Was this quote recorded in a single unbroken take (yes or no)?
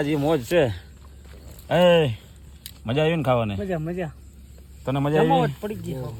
yes